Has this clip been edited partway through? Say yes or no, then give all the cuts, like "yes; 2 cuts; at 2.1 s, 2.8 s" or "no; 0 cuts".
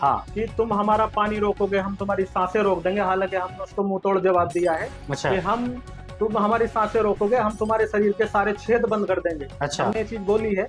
no; 0 cuts